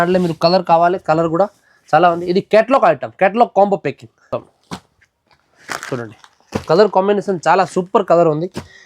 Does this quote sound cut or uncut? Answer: cut